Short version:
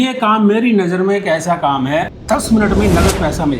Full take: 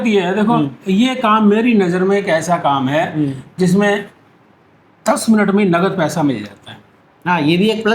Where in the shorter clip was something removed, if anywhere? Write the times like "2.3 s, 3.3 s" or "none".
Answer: 2.1 s